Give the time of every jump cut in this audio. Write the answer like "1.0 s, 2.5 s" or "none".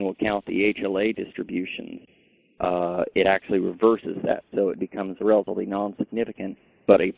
none